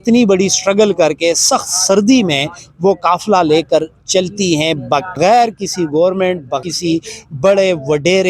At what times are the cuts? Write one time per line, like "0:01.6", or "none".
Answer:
0:05.2
0:06.6